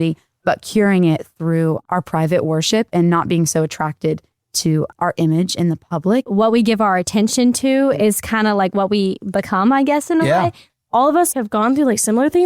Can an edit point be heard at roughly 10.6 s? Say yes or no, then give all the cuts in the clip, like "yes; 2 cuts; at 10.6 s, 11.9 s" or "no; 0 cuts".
yes; 2 cuts; at 6.3 s, 10.6 s